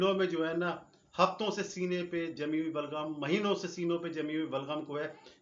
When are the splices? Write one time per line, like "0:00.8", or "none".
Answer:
none